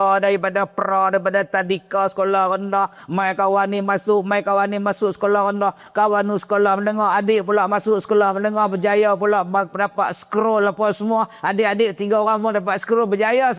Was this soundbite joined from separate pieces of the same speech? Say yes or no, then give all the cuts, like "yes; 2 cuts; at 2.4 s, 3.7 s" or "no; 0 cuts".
no; 0 cuts